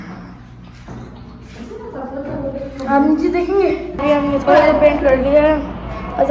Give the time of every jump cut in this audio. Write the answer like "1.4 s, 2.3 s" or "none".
4.0 s